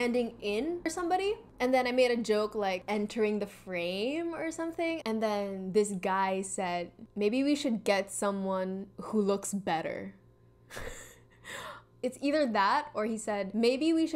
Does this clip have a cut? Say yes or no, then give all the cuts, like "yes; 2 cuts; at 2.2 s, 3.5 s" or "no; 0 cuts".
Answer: yes; 2 cuts; at 0.9 s, 2.8 s